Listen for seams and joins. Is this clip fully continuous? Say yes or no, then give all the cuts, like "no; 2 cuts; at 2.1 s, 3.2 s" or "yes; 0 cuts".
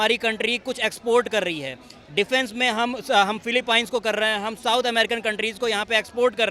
yes; 0 cuts